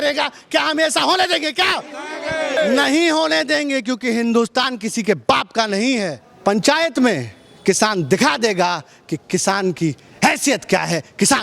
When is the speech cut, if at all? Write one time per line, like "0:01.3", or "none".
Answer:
0:02.6
0:06.2